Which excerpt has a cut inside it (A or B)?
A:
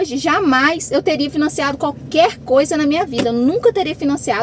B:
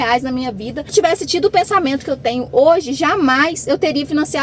B